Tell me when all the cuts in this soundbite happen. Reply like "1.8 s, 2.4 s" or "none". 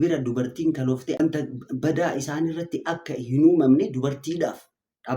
1.2 s